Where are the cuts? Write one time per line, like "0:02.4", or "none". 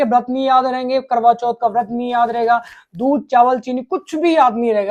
none